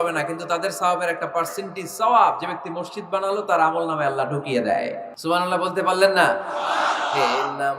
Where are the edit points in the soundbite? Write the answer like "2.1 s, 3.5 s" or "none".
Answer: 5.1 s